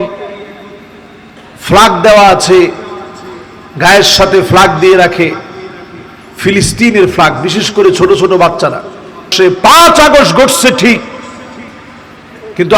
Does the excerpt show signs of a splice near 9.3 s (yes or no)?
yes